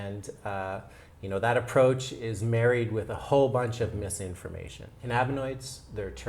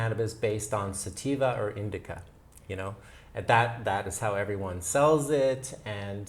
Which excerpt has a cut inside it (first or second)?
first